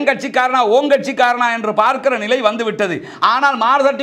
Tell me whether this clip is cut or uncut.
uncut